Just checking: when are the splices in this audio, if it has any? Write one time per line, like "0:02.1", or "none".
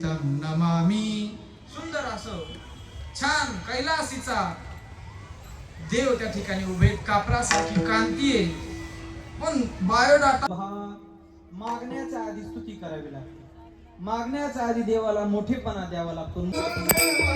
0:10.5